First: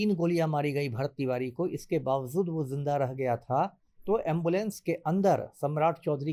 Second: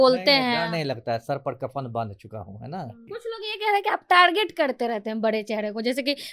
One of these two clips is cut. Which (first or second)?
second